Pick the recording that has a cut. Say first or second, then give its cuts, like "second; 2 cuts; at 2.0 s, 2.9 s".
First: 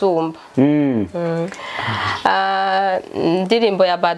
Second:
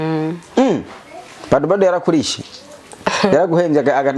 first; 1 cut; at 1.5 s